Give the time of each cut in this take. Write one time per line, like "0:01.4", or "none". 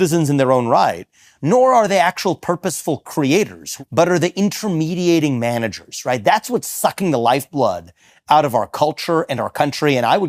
0:03.6